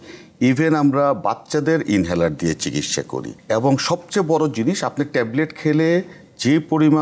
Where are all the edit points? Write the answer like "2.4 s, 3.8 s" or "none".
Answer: 3.2 s